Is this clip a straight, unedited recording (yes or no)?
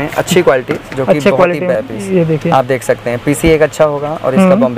yes